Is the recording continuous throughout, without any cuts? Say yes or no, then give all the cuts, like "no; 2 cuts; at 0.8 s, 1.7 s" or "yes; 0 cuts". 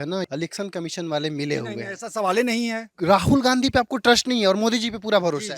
yes; 0 cuts